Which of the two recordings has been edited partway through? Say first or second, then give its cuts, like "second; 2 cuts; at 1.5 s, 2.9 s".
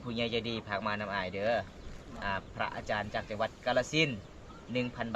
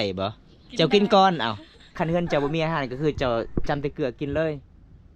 second; 1 cut; at 1.9 s